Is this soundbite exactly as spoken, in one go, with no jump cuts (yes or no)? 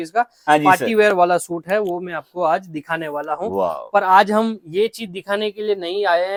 yes